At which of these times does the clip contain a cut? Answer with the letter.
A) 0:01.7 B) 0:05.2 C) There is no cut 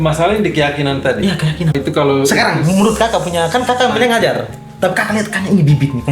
A